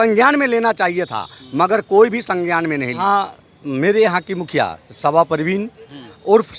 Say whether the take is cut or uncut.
cut